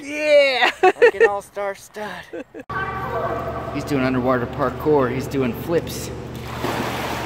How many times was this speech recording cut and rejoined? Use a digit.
1